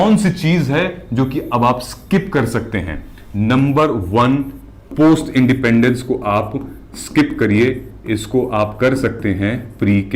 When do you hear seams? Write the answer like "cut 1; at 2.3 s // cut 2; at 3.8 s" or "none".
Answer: none